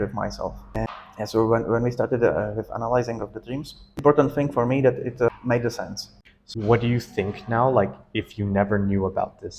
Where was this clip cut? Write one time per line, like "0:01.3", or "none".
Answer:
0:00.9
0:04.0
0:05.7